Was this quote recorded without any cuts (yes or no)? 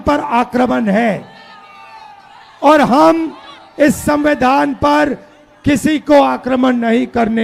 yes